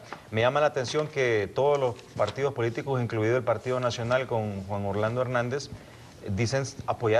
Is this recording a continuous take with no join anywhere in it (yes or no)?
no